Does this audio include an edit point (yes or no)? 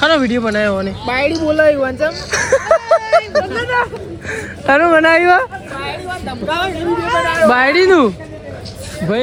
no